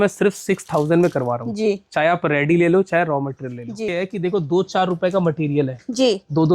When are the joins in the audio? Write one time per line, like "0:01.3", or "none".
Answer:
0:03.9